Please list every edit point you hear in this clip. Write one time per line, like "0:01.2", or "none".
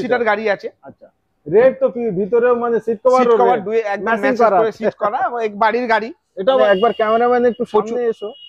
0:06.6